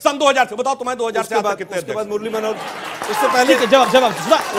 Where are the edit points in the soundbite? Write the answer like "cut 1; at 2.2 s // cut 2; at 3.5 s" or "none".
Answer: none